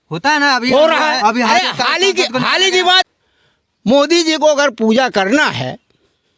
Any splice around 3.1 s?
yes; 2 cuts; at 1.5 s, 3.1 s

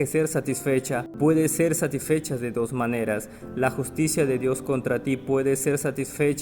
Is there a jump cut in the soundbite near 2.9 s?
no; 1 cut; at 1.1 s

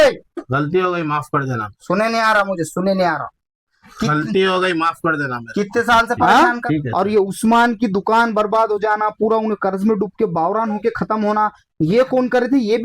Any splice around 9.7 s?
no; 1 cut; at 6.2 s

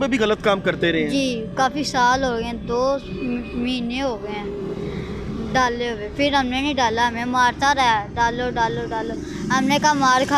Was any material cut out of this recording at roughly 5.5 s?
no; 0 cuts

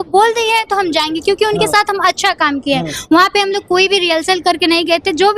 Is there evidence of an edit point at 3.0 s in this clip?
no; 0 cuts

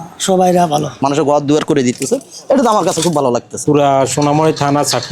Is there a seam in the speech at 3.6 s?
yes; 2 cuts; at 1.0 s, 3.6 s

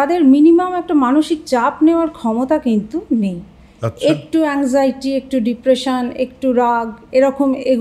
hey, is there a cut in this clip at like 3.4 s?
no; 0 cuts

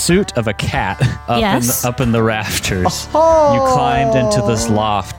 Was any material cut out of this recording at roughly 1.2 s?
yes; 1 cut; at 1.2 s

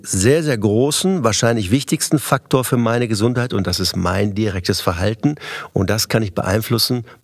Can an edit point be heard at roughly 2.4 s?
no; 0 cuts

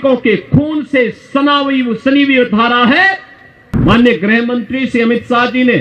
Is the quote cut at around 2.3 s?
no; 1 cut; at 3.8 s

